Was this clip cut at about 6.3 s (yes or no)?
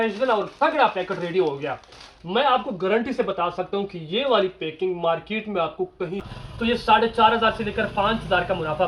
yes